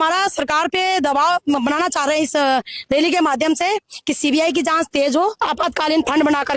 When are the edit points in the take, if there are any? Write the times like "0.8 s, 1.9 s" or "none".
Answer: 5.4 s